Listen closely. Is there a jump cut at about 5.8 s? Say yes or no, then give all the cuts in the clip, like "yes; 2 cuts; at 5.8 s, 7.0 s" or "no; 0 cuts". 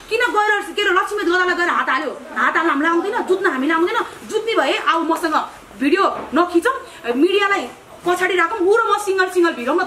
no; 0 cuts